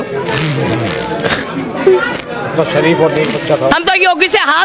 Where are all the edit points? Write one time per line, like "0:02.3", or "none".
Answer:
0:03.7